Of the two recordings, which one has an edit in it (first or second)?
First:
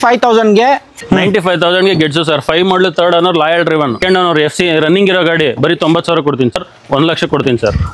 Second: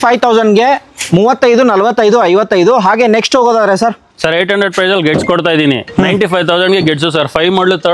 first